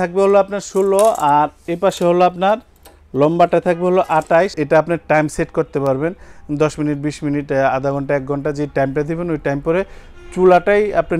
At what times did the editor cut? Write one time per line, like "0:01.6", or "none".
0:04.6

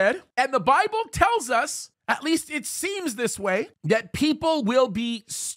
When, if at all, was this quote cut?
0:03.8

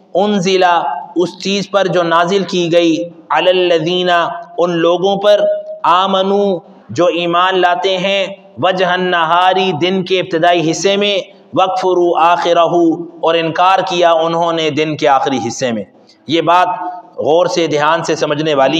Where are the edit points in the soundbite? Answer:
none

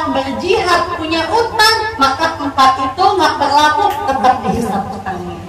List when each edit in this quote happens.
none

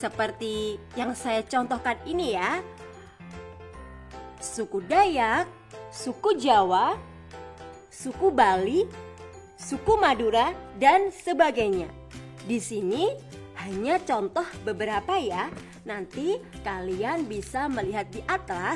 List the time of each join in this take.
none

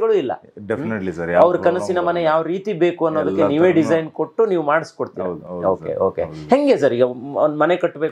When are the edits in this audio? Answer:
none

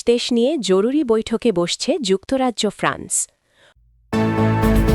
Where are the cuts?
0:03.7

